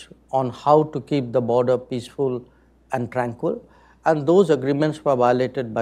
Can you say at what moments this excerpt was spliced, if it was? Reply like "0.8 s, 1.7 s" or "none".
none